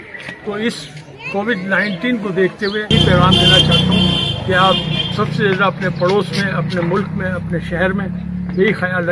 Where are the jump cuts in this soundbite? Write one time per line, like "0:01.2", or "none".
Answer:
none